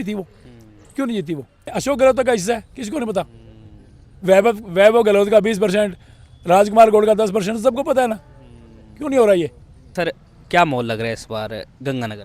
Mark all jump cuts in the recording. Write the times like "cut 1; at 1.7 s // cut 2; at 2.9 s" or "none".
cut 1; at 1.7 s // cut 2; at 9.9 s